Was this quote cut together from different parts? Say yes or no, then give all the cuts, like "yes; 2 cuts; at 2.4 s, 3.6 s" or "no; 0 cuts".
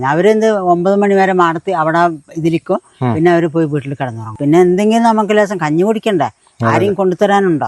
yes; 1 cut; at 4.3 s